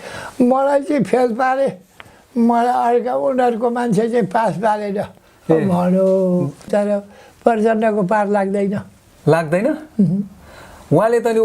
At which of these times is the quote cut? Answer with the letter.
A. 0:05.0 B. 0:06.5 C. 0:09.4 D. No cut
B